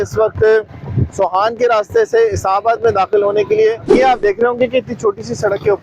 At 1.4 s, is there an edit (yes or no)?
no